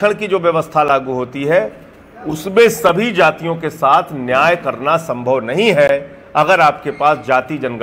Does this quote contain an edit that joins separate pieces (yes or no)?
no